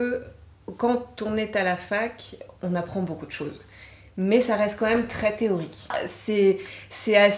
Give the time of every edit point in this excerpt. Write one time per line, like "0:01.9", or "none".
0:05.9